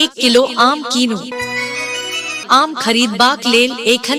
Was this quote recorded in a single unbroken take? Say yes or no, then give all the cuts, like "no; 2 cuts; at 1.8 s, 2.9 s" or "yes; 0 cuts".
yes; 0 cuts